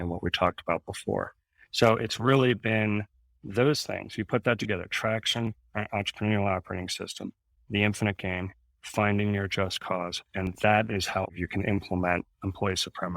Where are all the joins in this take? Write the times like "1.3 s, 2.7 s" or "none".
11.3 s